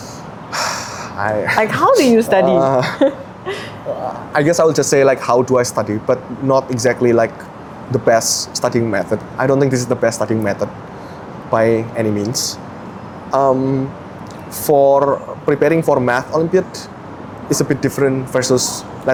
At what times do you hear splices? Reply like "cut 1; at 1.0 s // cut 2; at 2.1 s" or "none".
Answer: none